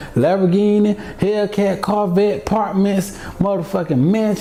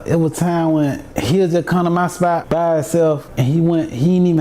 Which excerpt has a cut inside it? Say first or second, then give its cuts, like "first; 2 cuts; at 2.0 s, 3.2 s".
second; 3 cuts; at 1.1 s, 2.4 s, 3.3 s